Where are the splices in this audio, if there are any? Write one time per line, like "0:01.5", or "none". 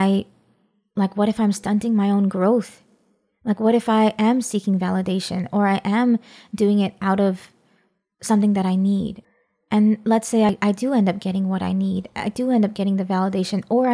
0:09.2
0:10.5